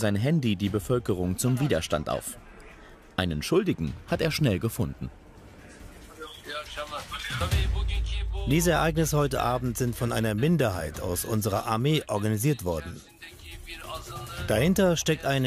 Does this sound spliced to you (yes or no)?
no